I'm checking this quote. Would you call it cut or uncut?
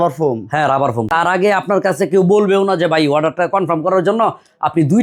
cut